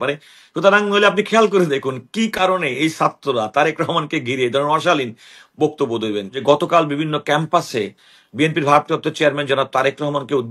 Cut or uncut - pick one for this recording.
cut